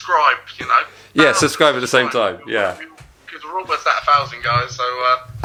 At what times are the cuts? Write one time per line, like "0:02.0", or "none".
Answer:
none